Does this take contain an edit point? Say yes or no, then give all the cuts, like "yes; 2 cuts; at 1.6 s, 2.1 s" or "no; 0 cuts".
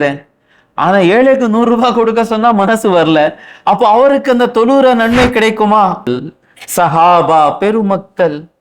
yes; 1 cut; at 6.1 s